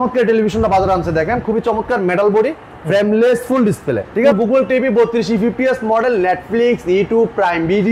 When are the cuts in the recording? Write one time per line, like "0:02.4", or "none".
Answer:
0:04.3